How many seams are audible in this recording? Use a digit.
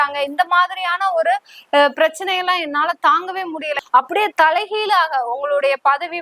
1